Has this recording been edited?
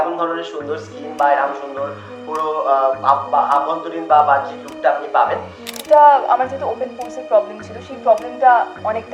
yes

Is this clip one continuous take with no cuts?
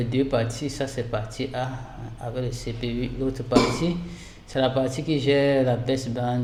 yes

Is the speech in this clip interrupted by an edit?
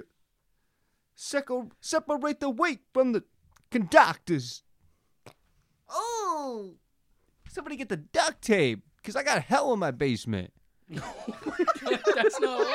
no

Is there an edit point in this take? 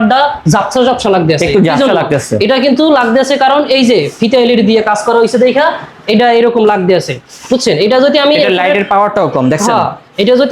no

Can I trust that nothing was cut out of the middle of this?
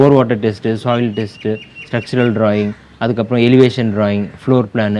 yes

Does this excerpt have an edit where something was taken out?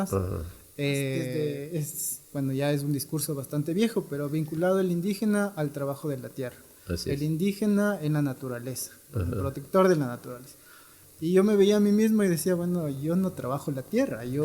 yes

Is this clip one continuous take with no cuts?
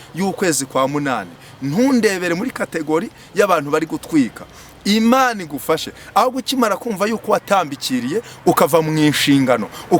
yes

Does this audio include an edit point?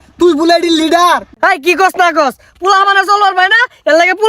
yes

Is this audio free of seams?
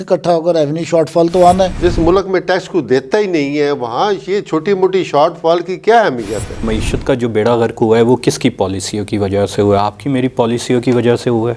no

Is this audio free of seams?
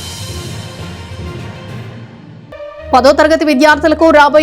no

